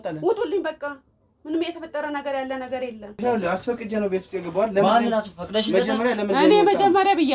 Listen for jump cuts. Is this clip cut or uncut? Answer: cut